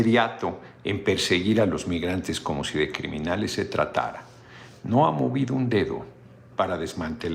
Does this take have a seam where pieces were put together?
no; 0 cuts

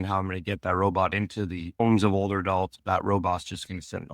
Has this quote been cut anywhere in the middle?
yes; 1 cut; at 2.8 s

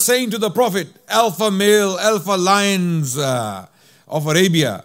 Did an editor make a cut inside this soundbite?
yes; 1 cut; at 1.0 s

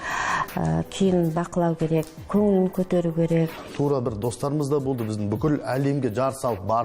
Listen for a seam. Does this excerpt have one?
yes; 1 cut; at 3.7 s

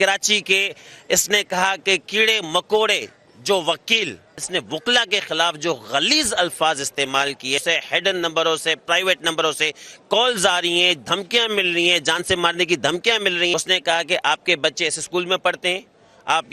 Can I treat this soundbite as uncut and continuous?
no; 3 cuts; at 4.4 s, 7.6 s, 13.5 s

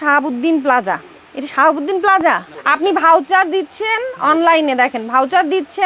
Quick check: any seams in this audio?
yes; 1 cut; at 2.5 s

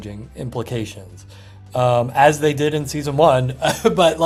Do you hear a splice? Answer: no; 0 cuts

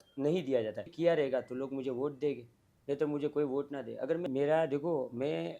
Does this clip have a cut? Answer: yes; 2 cuts; at 0.9 s, 4.2 s

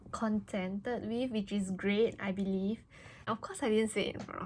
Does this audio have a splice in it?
yes; 1 cut; at 3.3 s

